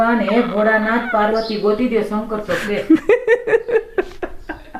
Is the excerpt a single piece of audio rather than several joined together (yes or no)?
yes